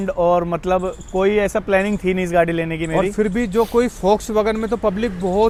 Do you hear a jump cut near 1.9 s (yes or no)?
no